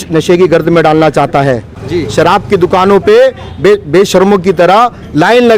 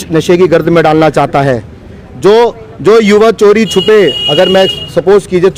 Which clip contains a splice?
first; 1 cut; at 1.9 s

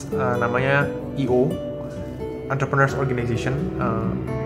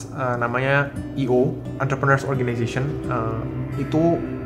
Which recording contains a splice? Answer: second; 1 cut; at 1.6 s

